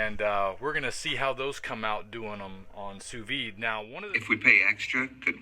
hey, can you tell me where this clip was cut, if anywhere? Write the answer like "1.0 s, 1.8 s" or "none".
3.9 s